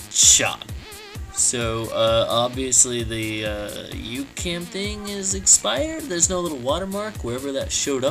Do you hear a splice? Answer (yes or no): yes